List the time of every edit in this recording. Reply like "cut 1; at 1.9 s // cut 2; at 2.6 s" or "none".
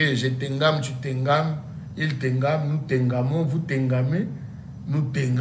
none